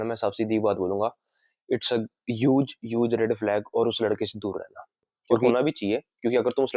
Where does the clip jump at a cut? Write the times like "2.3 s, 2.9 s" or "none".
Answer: 5.5 s